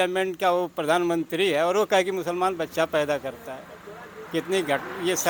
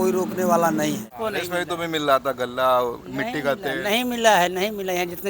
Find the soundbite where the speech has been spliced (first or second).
second